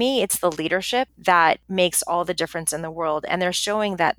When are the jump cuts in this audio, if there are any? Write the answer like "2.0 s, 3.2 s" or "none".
1.1 s, 1.6 s